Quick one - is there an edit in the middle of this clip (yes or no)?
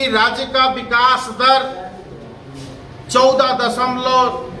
no